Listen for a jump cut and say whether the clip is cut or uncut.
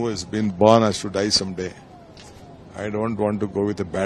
uncut